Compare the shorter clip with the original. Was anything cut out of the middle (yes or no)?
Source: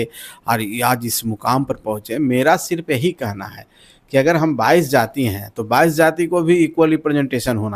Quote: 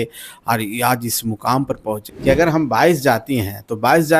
yes